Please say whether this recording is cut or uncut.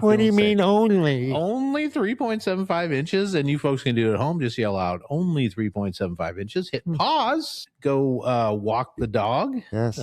cut